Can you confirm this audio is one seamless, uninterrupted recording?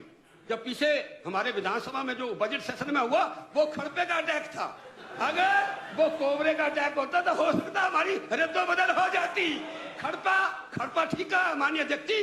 yes; 0 cuts

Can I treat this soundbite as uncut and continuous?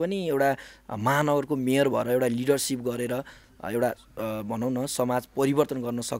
yes; 0 cuts

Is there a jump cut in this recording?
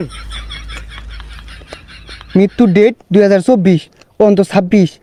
no; 0 cuts

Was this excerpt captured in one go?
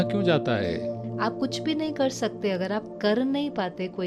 no; 1 cut; at 1.0 s

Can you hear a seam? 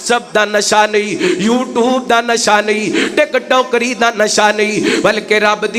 no; 0 cuts

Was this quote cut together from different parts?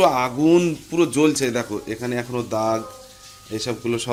no; 0 cuts

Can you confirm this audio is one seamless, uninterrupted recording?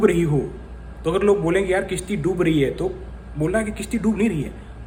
yes; 0 cuts

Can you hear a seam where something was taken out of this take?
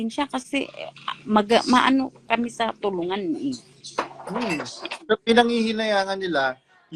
no; 0 cuts

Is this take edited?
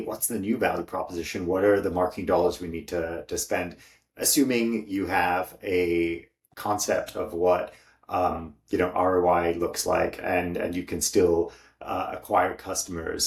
no; 0 cuts

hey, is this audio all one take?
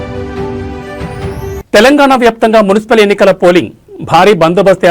yes; 0 cuts

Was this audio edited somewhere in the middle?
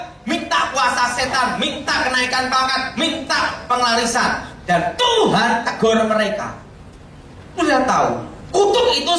no; 0 cuts

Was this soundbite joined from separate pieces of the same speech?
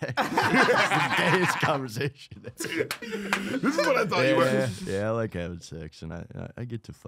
no; 0 cuts

